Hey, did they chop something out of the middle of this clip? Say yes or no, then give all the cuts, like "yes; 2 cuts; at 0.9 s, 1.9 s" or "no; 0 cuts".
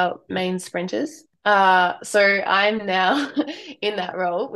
yes; 1 cut; at 1.3 s